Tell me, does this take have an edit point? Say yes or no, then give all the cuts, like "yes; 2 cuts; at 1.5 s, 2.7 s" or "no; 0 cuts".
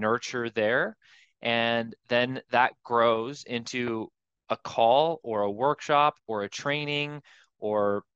no; 0 cuts